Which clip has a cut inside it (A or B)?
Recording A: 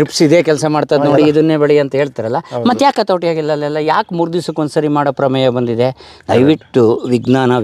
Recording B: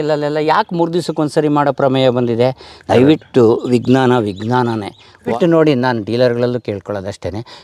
B